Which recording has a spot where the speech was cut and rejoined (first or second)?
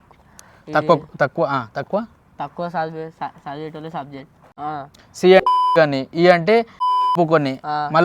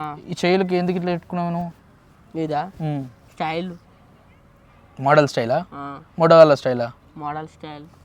first